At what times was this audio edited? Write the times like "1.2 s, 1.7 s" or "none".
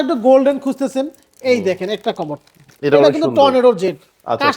none